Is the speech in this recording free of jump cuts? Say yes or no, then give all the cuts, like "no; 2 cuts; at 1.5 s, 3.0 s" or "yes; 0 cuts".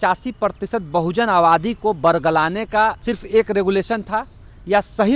no; 1 cut; at 3.0 s